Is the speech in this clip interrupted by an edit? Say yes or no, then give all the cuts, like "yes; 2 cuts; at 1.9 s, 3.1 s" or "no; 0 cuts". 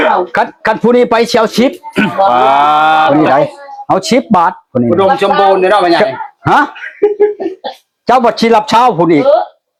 no; 0 cuts